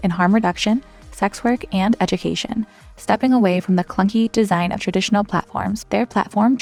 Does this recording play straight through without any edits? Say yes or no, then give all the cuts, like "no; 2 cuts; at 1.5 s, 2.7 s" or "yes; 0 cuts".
yes; 0 cuts